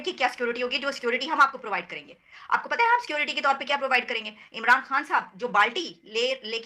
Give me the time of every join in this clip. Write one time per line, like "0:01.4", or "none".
none